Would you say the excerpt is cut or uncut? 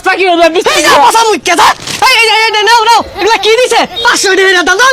uncut